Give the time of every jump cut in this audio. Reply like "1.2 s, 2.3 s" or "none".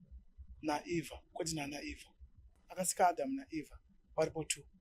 2.8 s